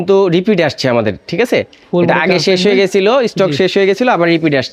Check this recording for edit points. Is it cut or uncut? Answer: uncut